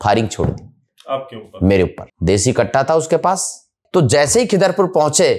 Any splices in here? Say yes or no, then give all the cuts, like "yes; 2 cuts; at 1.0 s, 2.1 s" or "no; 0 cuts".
yes; 2 cuts; at 2.1 s, 3.7 s